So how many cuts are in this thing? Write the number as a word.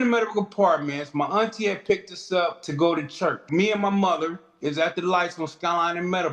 two